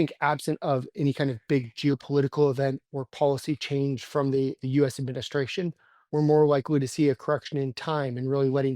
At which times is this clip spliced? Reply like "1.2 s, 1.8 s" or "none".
5.9 s

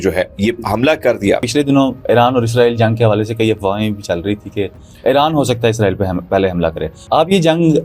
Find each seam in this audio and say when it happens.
1.5 s

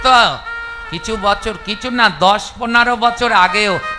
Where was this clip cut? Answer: none

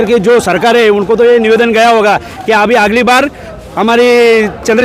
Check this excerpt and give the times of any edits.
none

